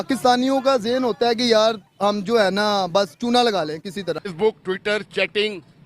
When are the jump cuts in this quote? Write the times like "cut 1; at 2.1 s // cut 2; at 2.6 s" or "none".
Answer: cut 1; at 4.3 s